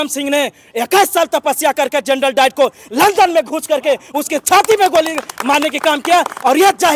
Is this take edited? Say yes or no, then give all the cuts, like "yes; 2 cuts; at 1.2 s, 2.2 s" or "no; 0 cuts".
no; 0 cuts